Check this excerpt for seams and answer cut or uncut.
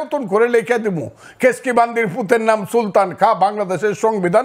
uncut